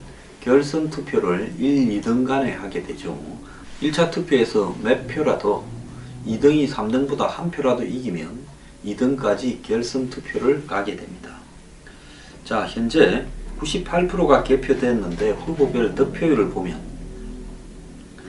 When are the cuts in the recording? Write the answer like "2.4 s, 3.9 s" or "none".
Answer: none